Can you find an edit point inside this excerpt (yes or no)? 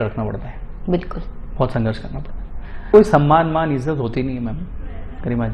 yes